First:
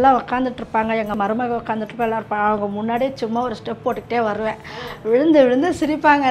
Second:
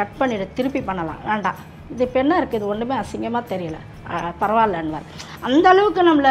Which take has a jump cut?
first; 1 cut; at 1.2 s

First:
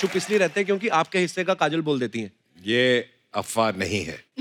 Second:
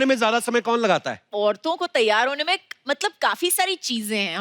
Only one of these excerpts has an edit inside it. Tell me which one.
second; 1 cut; at 1.2 s

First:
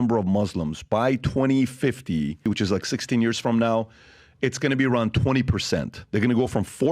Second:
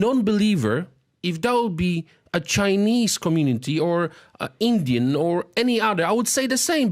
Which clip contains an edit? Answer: first; 1 cut; at 2.4 s

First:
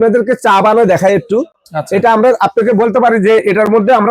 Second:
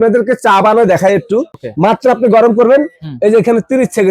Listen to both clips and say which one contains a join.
second; 1 cut; at 1.6 s

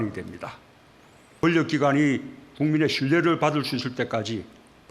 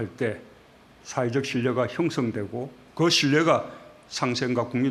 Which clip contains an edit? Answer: first; 1 cut; at 1.4 s

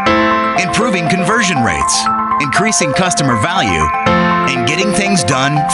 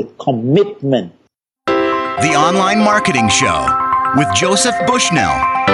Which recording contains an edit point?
second; 1 cut; at 1.3 s

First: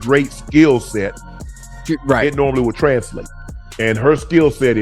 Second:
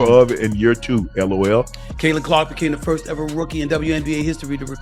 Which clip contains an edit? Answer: second; 1 cut; at 1.8 s

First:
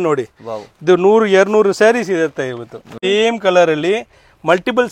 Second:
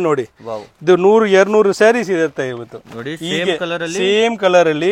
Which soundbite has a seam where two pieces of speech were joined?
first; 1 cut; at 2.9 s

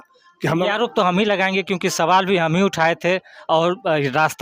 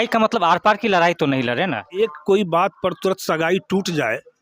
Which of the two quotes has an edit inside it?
second; 1 cut; at 2.0 s

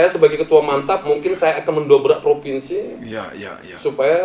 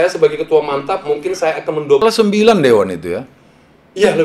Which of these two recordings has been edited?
second; 1 cut; at 2.0 s

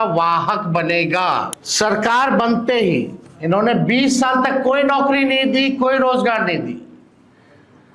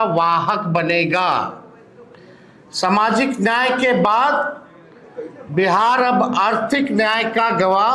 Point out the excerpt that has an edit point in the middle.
first; 1 cut; at 1.6 s

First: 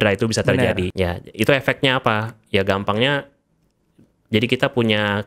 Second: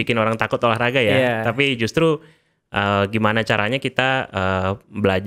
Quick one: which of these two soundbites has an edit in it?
first; 1 cut; at 0.9 s

